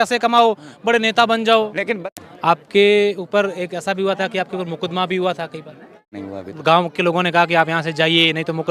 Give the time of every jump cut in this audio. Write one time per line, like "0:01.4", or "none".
0:02.0
0:06.2